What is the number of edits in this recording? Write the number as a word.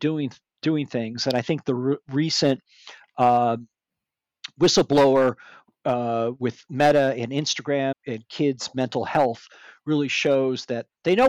one